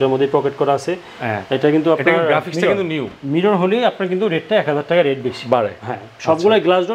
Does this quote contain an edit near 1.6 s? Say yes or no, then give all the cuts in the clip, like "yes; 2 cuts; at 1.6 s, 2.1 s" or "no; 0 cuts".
no; 0 cuts